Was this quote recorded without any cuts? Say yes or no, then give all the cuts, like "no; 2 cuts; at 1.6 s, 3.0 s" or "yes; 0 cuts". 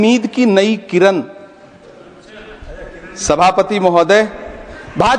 yes; 0 cuts